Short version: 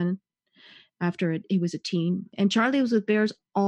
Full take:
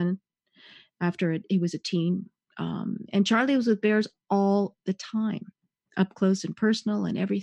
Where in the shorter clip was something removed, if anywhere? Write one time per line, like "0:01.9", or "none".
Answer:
0:02.3